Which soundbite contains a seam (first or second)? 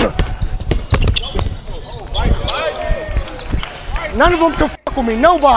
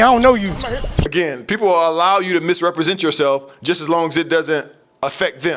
second